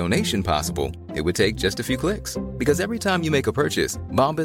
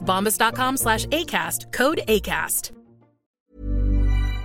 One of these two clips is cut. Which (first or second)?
second